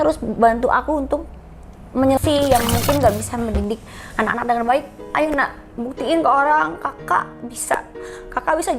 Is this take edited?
yes; 1 cut; at 2.2 s

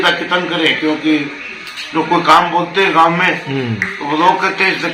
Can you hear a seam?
no; 0 cuts

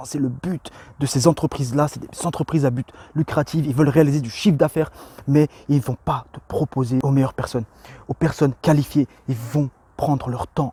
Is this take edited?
no; 0 cuts

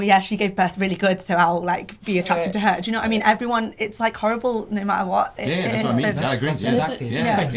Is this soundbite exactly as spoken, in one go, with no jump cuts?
yes; 0 cuts

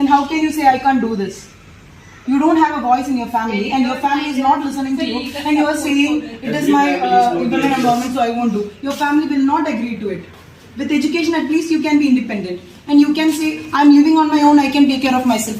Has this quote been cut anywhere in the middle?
no; 0 cuts

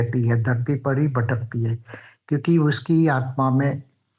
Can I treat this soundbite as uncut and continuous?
yes; 0 cuts

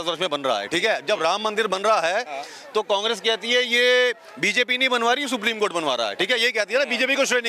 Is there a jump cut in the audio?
no; 0 cuts

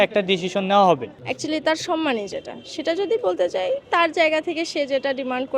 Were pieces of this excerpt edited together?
yes; 1 cut; at 1.0 s

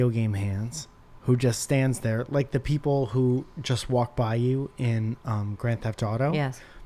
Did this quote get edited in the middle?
no; 0 cuts

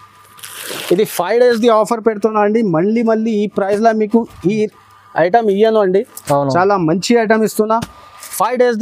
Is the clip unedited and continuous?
yes; 0 cuts

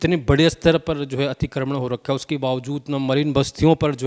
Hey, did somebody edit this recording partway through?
no; 0 cuts

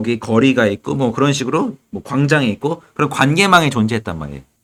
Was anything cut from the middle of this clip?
no; 0 cuts

